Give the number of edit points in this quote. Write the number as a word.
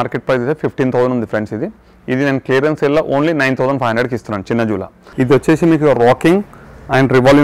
one